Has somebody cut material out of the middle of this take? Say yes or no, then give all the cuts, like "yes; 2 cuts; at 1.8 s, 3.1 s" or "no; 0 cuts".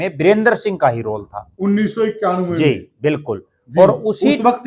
no; 0 cuts